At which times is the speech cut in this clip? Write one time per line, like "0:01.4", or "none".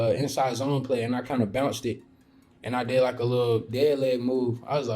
0:03.7